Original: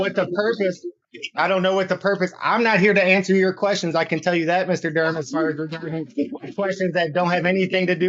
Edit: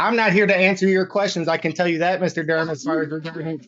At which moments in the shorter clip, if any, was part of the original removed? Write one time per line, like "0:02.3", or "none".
none